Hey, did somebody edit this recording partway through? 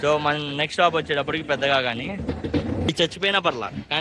yes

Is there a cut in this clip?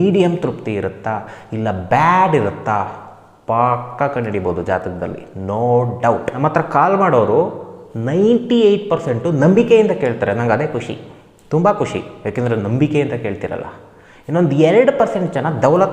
yes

